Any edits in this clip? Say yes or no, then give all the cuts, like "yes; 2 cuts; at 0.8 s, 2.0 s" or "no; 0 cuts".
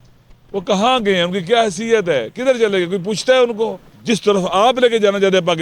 yes; 1 cut; at 3.9 s